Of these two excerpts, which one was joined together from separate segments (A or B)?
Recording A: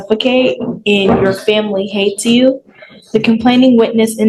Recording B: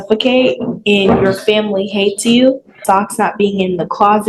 B